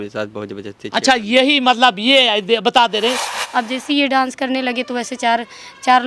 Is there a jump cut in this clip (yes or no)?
yes